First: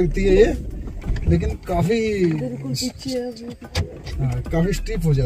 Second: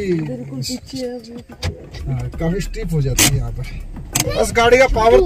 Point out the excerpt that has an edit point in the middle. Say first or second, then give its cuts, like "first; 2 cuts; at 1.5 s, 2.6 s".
second; 1 cut; at 4.2 s